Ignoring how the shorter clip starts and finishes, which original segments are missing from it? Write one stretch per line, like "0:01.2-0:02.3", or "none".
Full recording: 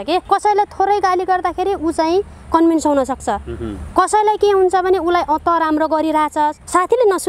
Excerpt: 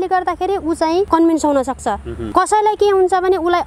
0:02.2-0:02.5
0:03.5-0:03.7